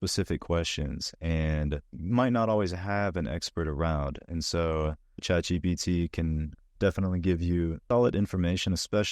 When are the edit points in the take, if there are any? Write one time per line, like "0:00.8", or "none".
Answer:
0:01.9
0:05.2
0:07.8

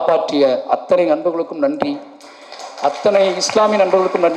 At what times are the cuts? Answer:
none

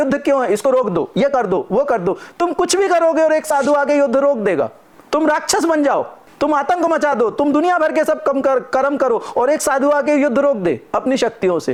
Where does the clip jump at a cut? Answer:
none

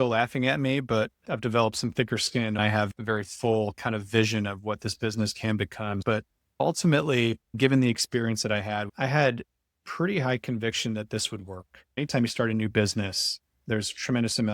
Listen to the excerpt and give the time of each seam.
0:02.6
0:06.0
0:08.9
0:11.9

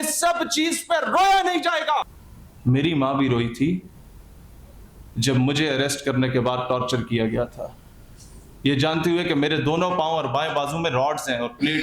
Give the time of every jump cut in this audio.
0:02.2

